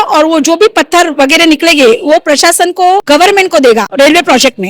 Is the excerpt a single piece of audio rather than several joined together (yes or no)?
no